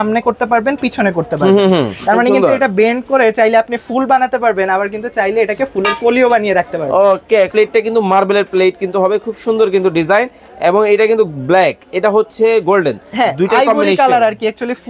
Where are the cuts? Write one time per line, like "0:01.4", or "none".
0:07.5